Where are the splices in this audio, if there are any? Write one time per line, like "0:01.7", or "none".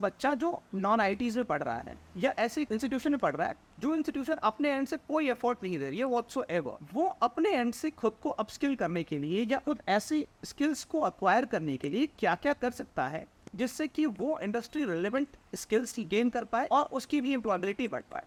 none